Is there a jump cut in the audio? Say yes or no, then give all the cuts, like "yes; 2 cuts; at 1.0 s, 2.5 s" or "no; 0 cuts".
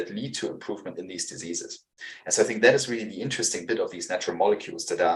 no; 0 cuts